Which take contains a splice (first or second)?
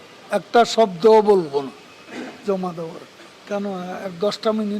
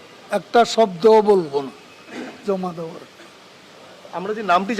first